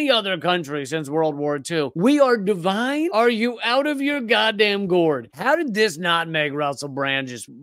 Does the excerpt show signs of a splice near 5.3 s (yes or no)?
yes